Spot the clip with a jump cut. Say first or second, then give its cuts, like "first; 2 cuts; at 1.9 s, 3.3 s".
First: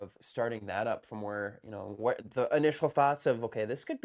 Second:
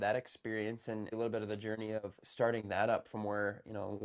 second; 1 cut; at 1.1 s